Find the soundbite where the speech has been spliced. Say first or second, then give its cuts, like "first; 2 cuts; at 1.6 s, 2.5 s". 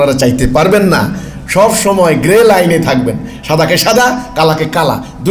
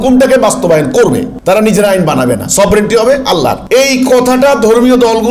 second; 2 cuts; at 1.3 s, 3.6 s